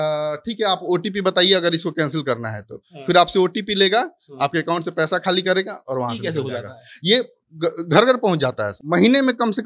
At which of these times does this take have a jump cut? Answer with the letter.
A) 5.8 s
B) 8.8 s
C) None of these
B